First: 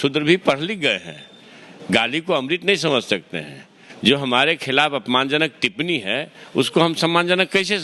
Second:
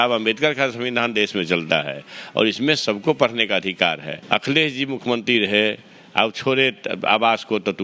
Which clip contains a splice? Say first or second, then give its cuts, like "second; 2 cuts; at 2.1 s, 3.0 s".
second; 1 cut; at 4.1 s